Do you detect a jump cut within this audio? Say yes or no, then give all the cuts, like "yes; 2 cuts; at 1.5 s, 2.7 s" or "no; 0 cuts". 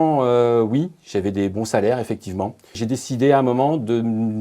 yes; 1 cut; at 2.8 s